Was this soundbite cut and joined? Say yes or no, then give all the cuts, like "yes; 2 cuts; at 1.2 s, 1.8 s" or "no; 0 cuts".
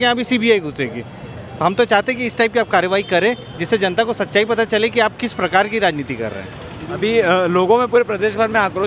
no; 0 cuts